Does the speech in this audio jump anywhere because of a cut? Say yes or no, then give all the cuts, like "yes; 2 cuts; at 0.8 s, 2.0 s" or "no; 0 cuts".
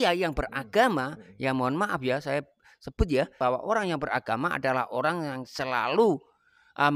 yes; 1 cut; at 3.3 s